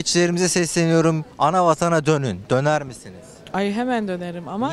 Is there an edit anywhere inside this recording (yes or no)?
no